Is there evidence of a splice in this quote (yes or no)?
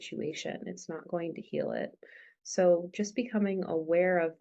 no